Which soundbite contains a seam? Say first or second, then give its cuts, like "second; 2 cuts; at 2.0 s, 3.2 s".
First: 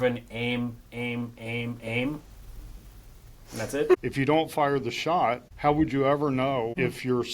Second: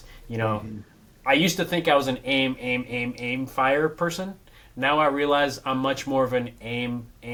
first; 1 cut; at 3.9 s